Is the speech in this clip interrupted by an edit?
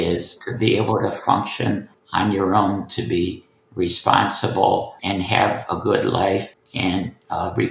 yes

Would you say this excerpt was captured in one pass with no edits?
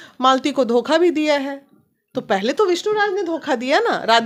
yes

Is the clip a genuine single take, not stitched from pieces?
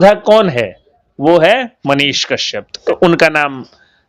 no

